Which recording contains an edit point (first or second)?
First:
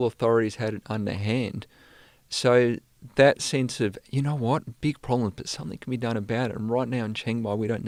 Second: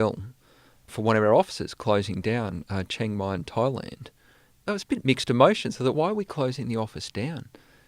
second